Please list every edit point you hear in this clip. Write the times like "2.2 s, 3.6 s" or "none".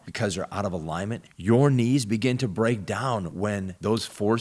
3.5 s